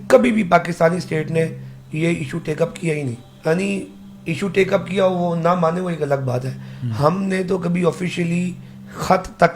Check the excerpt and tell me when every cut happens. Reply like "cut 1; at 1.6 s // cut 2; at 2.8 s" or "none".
cut 1; at 3.3 s

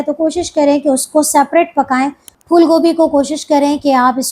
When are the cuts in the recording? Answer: cut 1; at 2.3 s

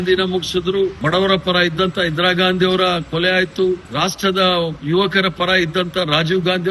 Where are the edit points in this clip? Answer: cut 1; at 1.0 s // cut 2; at 3.9 s

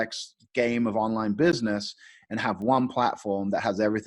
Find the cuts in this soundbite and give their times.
none

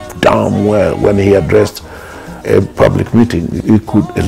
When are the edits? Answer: none

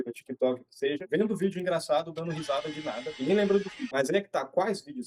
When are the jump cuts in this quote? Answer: none

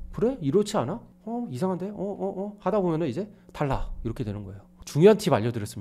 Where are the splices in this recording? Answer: none

